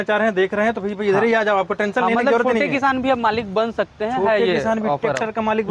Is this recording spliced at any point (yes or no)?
no